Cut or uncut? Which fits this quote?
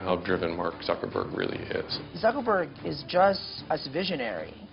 cut